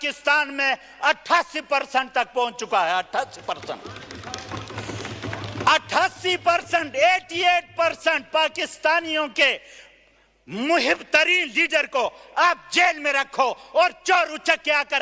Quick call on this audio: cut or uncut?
uncut